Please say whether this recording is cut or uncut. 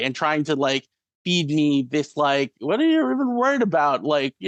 uncut